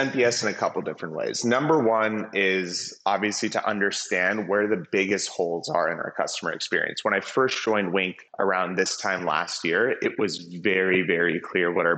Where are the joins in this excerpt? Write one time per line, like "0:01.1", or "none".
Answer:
0:08.2